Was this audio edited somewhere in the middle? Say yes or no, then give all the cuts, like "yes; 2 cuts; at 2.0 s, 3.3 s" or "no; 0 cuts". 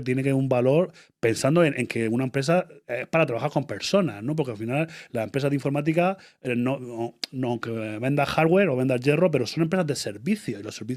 no; 0 cuts